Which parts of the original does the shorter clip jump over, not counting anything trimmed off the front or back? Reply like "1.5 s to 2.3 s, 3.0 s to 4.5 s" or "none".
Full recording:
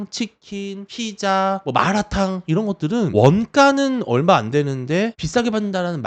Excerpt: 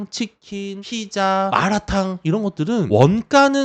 1.2 s to 1.4 s